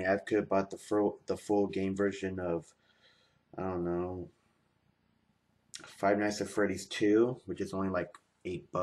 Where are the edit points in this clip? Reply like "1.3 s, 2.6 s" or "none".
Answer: none